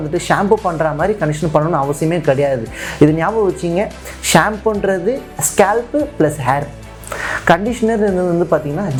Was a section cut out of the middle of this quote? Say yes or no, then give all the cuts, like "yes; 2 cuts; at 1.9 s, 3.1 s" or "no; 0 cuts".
no; 0 cuts